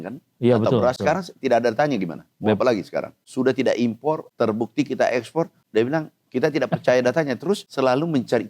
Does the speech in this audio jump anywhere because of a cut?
yes; 5 cuts; at 1.0 s, 3.2 s, 4.3 s, 5.6 s, 7.7 s

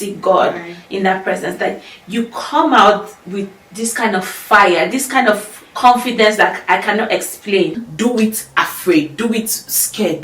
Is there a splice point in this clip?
yes; 1 cut; at 7.8 s

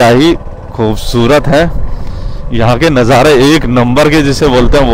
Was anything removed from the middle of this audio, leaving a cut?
no; 0 cuts

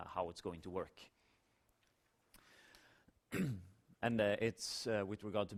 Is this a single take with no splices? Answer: yes; 0 cuts

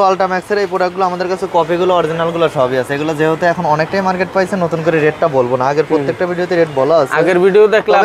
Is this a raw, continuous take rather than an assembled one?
yes; 0 cuts

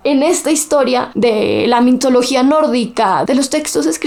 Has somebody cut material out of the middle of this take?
no; 0 cuts

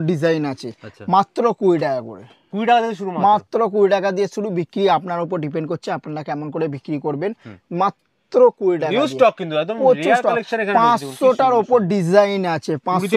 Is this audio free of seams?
yes; 0 cuts

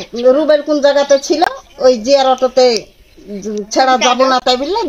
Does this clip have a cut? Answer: no; 0 cuts

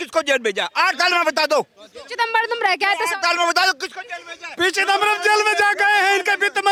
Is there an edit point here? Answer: no; 0 cuts

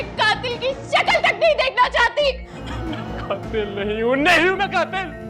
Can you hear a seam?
yes; 1 cut; at 2.6 s

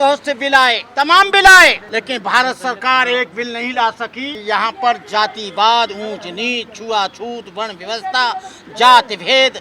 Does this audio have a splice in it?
yes; 3 cuts; at 0.8 s, 1.8 s, 4.3 s

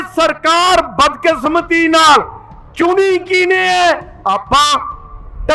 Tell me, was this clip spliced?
no; 0 cuts

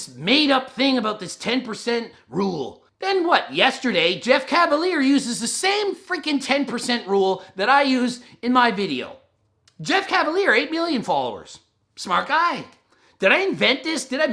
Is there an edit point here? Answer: yes; 2 cuts; at 2.8 s, 9.6 s

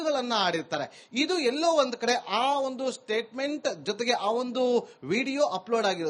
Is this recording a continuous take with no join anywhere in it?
yes; 0 cuts

